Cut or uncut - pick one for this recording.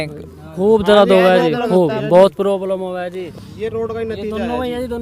cut